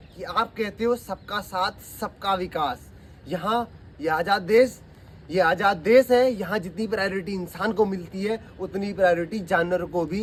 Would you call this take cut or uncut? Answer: uncut